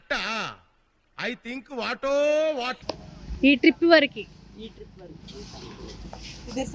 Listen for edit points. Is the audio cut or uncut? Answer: uncut